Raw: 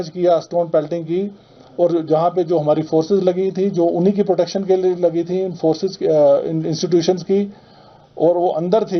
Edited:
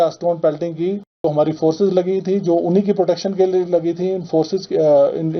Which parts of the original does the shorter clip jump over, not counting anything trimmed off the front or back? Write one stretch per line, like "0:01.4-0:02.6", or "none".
0:01.5-0:02.5